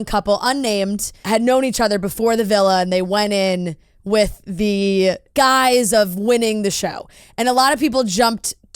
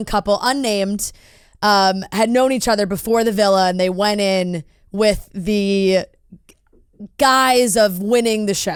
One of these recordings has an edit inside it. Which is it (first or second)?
first